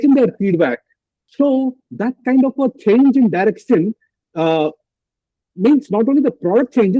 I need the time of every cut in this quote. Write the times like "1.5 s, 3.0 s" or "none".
1.1 s

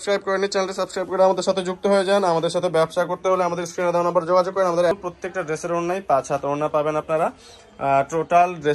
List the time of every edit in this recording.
4.9 s

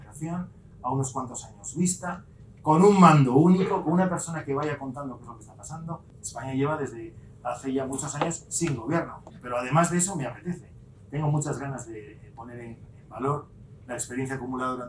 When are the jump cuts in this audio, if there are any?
6.1 s, 9.3 s

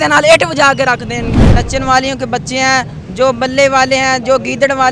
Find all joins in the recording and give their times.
1.2 s

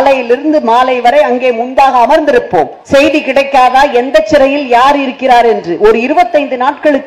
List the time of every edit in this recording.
2.8 s

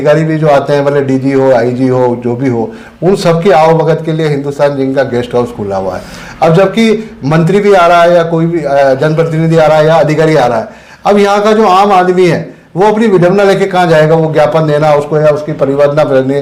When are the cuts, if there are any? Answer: none

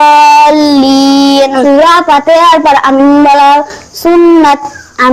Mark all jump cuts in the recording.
1.5 s

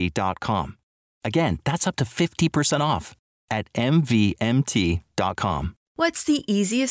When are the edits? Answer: 5.8 s

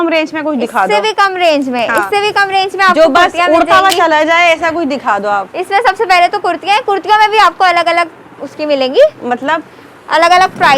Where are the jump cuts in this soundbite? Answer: none

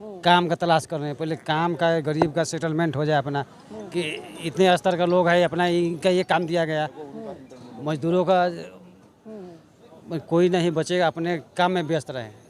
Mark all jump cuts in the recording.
none

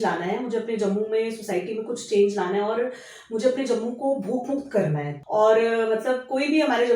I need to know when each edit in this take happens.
5.1 s

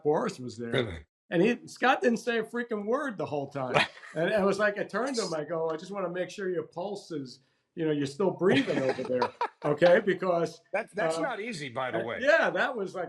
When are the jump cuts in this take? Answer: none

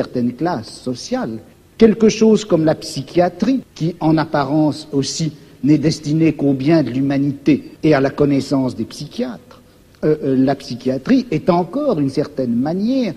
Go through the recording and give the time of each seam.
1.5 s, 3.7 s, 7.7 s

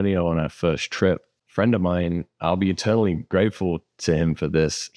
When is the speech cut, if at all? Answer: 1.4 s

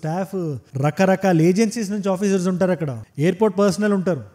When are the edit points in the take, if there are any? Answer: none

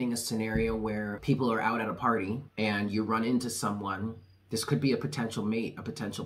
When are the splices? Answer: 1.2 s, 2.5 s

